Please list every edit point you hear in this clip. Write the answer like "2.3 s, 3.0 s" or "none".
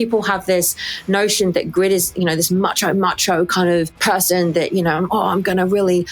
4.0 s